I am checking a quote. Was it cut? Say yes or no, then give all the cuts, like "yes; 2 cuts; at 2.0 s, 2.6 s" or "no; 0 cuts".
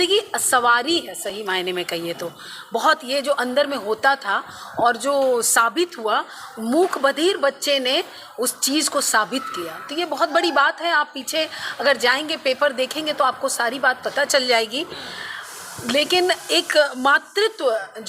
no; 0 cuts